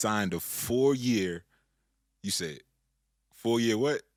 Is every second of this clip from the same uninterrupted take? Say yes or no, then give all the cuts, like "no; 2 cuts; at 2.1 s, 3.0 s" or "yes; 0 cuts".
yes; 0 cuts